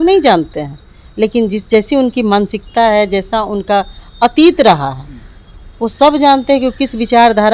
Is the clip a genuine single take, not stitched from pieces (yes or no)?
yes